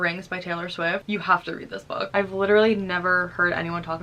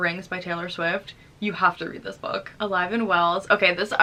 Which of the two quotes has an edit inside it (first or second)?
first